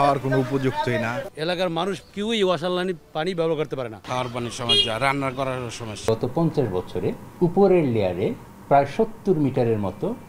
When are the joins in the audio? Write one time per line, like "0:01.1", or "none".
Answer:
0:01.3
0:04.0
0:06.0
0:07.2
0:08.5